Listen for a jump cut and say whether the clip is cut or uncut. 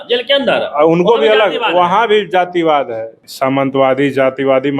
cut